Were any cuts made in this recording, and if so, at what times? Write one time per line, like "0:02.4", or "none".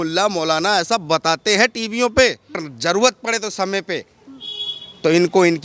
0:02.6